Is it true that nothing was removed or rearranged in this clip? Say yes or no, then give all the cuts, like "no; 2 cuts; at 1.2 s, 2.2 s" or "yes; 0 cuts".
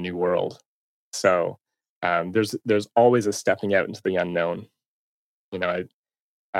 yes; 0 cuts